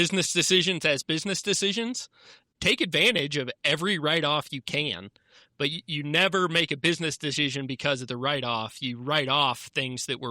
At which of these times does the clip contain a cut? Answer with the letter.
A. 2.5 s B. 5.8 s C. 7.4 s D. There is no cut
A